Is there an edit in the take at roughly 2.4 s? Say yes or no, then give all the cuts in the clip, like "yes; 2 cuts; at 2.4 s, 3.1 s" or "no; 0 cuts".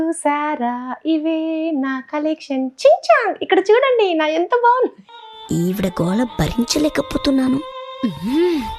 no; 0 cuts